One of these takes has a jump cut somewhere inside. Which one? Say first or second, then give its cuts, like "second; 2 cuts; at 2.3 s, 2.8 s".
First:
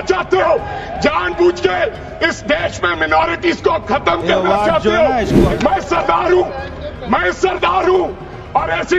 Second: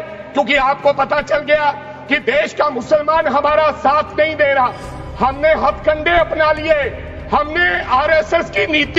first; 1 cut; at 5.4 s